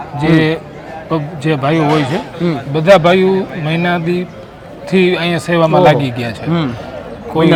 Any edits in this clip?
no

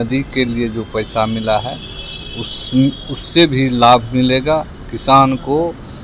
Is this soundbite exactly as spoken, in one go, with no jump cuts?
yes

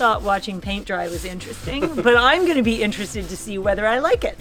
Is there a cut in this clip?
no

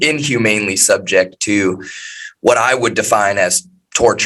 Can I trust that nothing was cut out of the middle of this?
yes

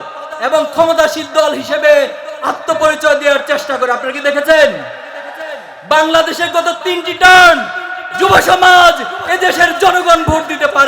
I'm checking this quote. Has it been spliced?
no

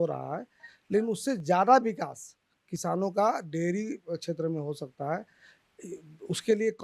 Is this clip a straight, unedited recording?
yes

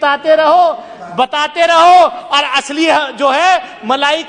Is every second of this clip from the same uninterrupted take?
yes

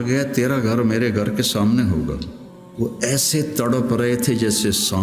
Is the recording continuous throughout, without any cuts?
no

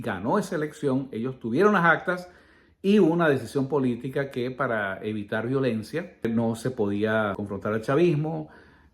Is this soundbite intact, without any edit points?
no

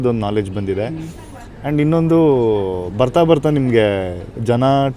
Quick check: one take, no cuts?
yes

